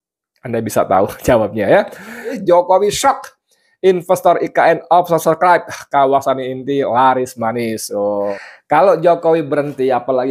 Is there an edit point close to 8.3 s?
yes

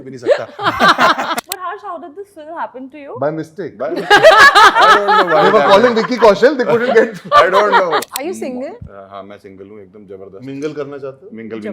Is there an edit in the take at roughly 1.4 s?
yes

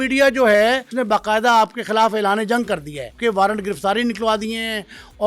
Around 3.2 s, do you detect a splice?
yes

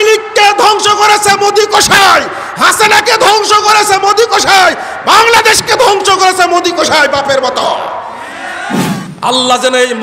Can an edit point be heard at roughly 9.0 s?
yes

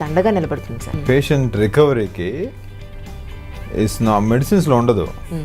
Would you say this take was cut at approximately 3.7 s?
no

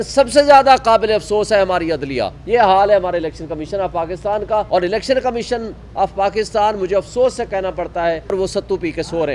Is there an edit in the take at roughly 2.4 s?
yes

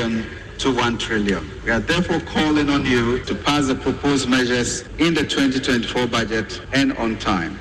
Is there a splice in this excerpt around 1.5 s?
yes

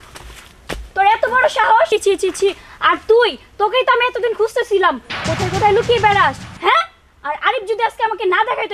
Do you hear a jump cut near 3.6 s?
no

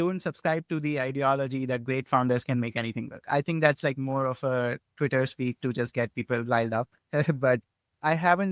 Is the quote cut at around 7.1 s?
no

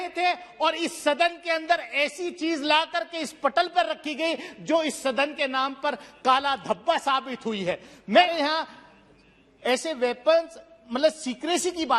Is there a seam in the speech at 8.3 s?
yes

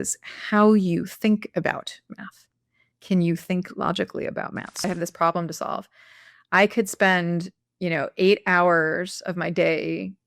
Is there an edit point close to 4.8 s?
yes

